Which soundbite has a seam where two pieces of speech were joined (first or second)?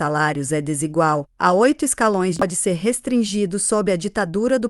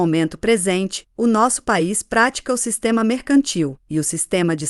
first